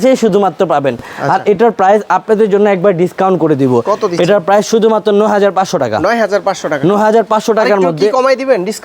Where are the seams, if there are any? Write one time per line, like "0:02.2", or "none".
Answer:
none

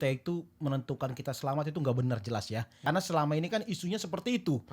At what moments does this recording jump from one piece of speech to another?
0:02.8

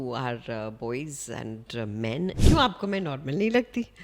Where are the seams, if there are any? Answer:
0:02.4

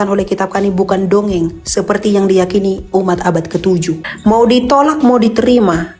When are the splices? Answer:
0:04.0

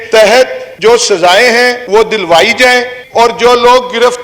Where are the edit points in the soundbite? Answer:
0:02.9

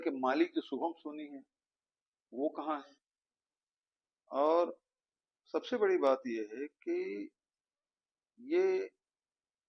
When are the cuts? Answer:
none

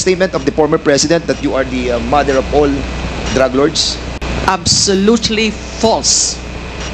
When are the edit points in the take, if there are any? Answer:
0:04.2

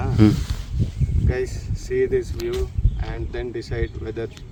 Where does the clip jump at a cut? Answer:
none

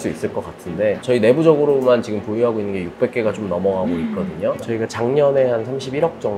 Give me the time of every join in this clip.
0:01.0
0:04.6

